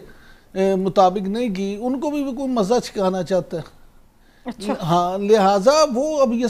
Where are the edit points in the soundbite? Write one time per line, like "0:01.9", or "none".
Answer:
none